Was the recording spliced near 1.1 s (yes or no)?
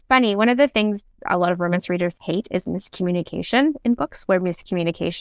yes